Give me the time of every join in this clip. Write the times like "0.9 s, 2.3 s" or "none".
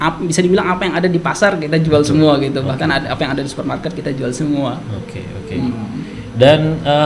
none